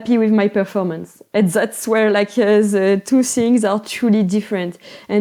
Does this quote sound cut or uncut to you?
uncut